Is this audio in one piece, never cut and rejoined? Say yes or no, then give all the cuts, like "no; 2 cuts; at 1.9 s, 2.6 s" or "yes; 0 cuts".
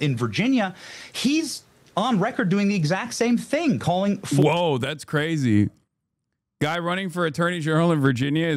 yes; 0 cuts